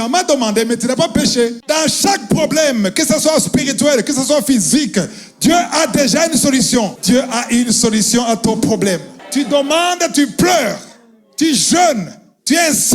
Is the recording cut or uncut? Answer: cut